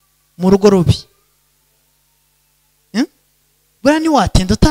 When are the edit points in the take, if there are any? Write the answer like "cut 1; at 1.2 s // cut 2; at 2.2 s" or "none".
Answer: none